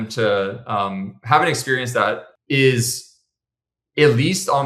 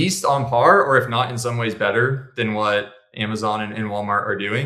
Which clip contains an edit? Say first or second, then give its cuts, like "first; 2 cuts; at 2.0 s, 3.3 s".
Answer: first; 1 cut; at 2.3 s